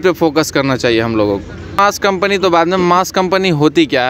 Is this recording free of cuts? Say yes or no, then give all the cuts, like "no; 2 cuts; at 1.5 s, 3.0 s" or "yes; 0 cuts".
no; 1 cut; at 1.8 s